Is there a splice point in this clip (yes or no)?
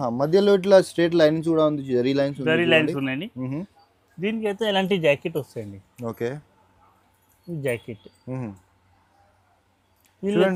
no